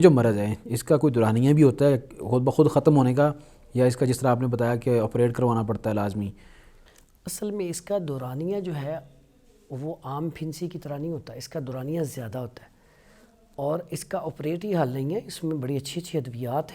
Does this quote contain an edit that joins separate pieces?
no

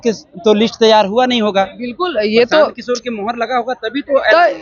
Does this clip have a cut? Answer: no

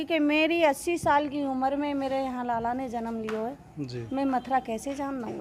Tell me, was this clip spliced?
no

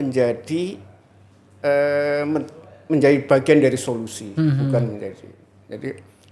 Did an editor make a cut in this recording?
no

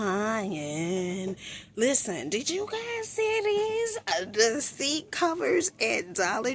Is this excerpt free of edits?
yes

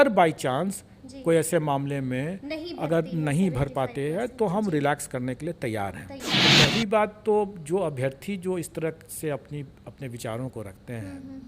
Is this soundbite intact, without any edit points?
no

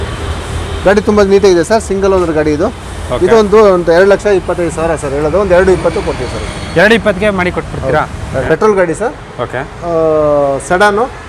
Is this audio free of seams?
no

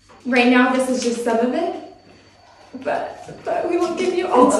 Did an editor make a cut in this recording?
no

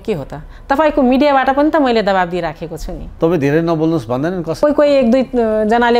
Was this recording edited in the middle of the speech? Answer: yes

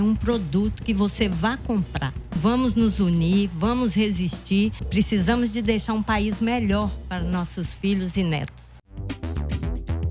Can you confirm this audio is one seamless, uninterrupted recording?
no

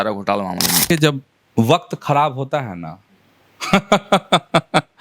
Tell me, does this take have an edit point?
yes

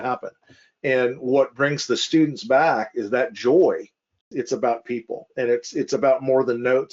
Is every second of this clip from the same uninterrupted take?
no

